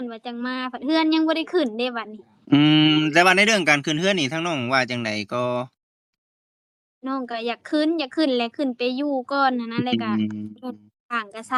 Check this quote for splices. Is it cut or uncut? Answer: uncut